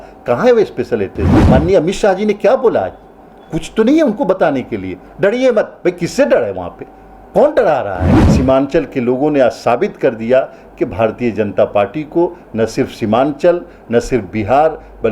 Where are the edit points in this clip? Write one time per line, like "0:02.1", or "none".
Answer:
0:01.3
0:08.2